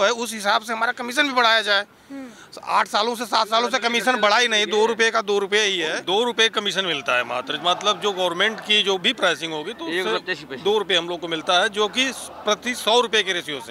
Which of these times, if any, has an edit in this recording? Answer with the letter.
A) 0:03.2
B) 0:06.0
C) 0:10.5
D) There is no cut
B